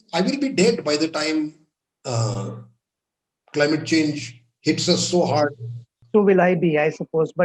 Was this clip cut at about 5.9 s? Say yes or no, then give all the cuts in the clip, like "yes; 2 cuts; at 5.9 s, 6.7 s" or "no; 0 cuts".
yes; 1 cut; at 5.9 s